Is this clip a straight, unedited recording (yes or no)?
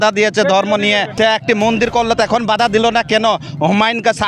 no